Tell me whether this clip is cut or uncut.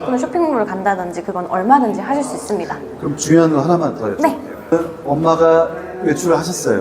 uncut